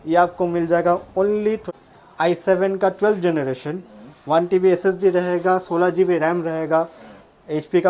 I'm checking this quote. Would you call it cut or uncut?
cut